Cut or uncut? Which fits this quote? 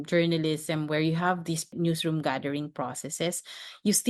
cut